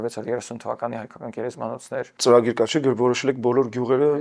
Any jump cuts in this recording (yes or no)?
yes